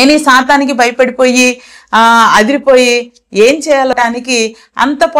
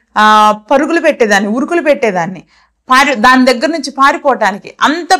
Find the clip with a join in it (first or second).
first